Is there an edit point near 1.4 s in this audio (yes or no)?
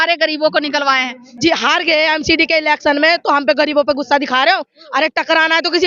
yes